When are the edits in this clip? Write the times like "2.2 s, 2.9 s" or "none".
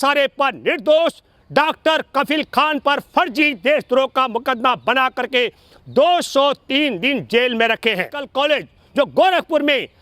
8.3 s